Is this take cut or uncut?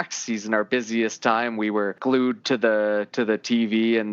cut